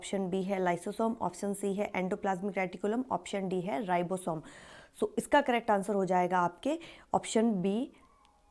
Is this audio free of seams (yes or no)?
yes